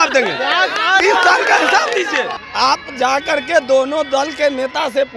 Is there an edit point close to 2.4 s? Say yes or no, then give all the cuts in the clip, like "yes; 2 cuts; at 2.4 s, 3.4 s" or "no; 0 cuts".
yes; 1 cut; at 2.4 s